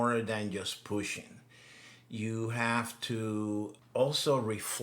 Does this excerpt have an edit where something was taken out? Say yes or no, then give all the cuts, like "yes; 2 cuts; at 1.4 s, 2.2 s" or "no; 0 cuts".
yes; 1 cut; at 3.8 s